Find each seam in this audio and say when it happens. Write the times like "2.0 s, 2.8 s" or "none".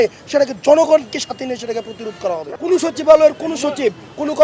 2.4 s